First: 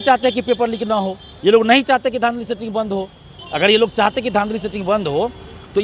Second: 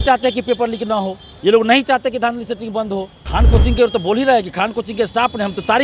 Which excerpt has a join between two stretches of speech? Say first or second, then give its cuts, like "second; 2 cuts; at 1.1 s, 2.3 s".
second; 1 cut; at 3.2 s